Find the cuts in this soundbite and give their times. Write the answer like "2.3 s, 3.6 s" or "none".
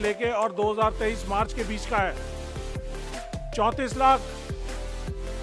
2.1 s, 3.6 s